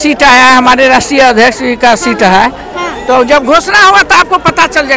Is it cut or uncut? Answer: uncut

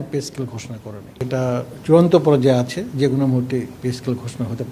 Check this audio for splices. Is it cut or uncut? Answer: cut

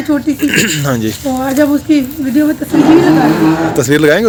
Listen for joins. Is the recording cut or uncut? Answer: uncut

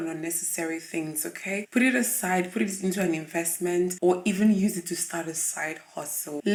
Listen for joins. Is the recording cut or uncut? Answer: uncut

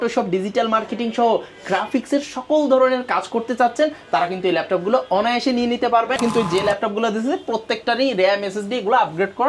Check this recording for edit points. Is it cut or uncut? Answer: cut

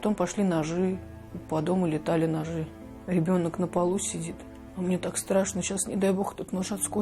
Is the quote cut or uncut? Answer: uncut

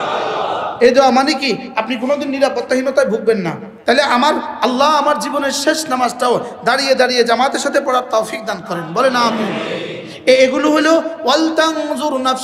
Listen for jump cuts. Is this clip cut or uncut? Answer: cut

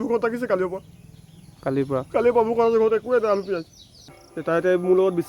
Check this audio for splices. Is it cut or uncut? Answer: cut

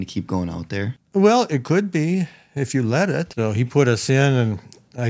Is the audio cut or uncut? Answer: cut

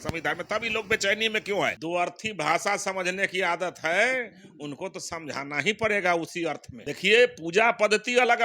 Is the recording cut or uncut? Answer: cut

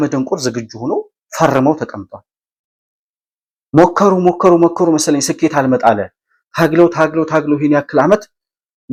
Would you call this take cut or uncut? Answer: uncut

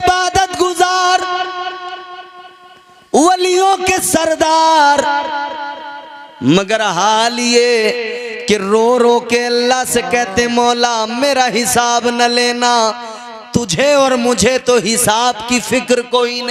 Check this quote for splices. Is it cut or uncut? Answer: uncut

